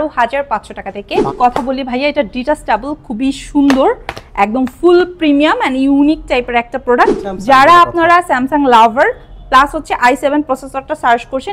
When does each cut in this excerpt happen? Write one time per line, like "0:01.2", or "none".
0:01.3
0:07.3